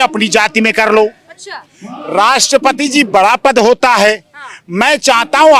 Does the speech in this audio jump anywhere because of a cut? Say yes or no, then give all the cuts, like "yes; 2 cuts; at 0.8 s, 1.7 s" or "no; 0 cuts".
no; 0 cuts